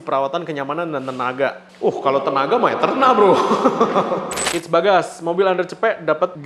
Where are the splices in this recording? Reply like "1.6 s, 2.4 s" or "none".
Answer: 4.4 s